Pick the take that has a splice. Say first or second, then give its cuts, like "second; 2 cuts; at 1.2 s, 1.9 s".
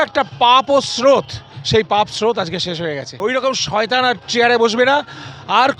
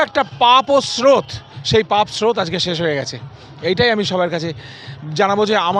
first; 1 cut; at 3.1 s